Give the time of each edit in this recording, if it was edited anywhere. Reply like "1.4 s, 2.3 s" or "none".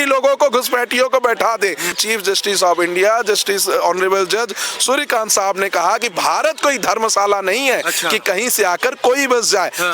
2.0 s

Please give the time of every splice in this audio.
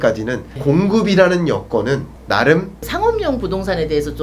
2.1 s, 2.8 s

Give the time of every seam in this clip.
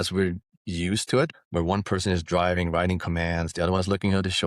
1.3 s

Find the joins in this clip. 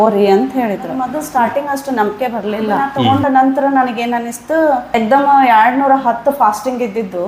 1.2 s, 2.9 s, 4.9 s

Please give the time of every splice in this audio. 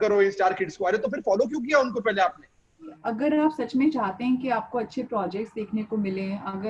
3.0 s

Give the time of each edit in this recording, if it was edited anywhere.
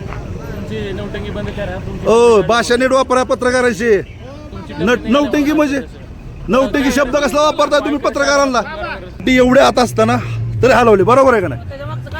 9.2 s

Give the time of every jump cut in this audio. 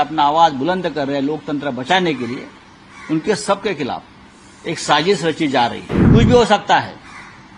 5.9 s

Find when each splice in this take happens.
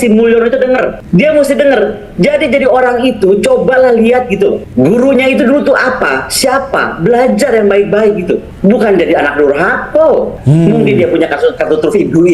1.0 s, 4.6 s, 8.5 s, 10.4 s, 11.6 s

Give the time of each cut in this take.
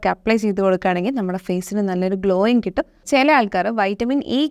3.0 s

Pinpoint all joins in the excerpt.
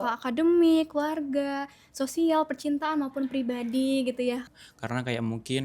4.5 s

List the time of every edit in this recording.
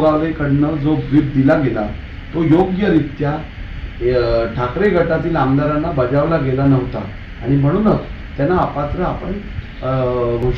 none

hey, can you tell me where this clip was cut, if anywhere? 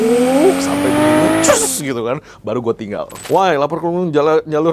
3.1 s

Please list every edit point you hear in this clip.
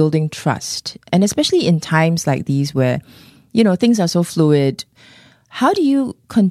1.1 s, 4.9 s

